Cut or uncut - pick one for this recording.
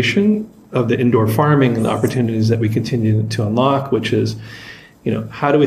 uncut